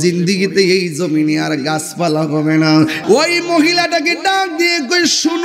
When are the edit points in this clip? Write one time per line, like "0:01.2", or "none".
0:03.0